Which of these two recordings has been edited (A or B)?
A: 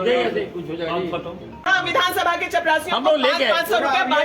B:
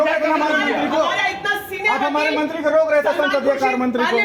A